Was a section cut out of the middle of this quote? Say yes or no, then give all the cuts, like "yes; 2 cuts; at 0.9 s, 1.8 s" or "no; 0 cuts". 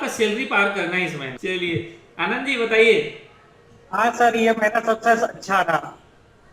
yes; 1 cut; at 1.3 s